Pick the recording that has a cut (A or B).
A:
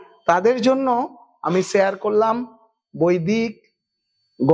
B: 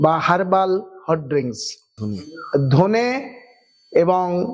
B